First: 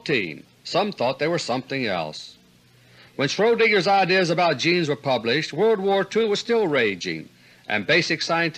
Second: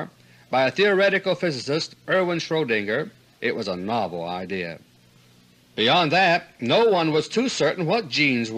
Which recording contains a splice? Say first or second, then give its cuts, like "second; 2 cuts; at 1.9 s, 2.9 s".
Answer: first; 1 cut; at 4.6 s